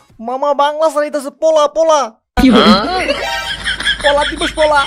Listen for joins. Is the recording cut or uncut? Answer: uncut